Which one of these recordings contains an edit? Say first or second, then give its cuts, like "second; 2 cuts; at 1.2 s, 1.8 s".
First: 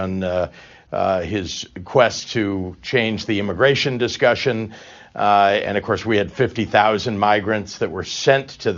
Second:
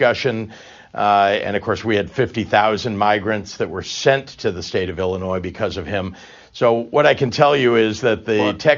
second; 1 cut; at 7.4 s